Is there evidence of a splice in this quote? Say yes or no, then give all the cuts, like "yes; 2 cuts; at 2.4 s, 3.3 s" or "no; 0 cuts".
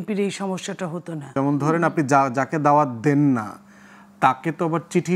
yes; 1 cut; at 1.2 s